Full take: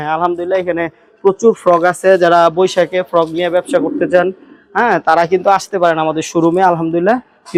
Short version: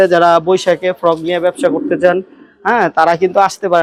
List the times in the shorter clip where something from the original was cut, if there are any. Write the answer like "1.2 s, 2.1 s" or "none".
none